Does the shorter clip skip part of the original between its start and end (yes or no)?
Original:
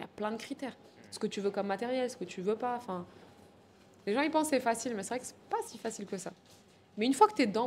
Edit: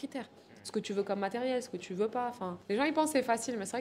yes